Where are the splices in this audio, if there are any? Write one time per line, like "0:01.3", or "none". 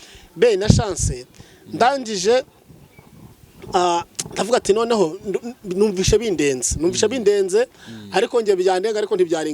none

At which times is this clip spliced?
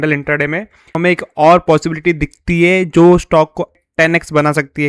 0:01.0
0:03.8

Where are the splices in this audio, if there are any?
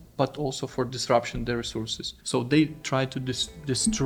none

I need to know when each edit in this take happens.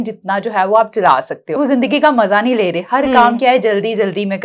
0:01.6

